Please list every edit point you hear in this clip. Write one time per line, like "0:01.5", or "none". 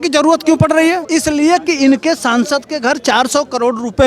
0:01.0

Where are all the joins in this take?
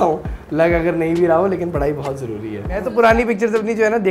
0:02.9

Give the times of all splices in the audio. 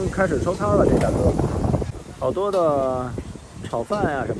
0:02.0

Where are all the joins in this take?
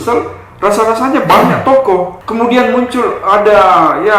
0:02.2

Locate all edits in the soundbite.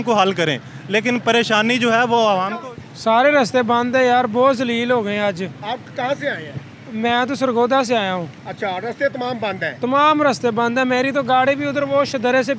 0:02.6

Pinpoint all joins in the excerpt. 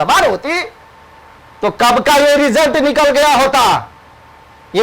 none

